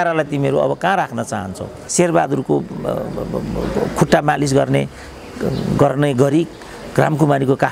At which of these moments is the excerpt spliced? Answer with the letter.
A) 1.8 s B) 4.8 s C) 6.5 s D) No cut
A